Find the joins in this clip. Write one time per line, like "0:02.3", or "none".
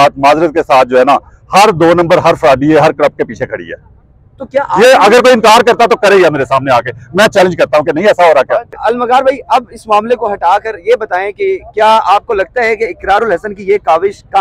none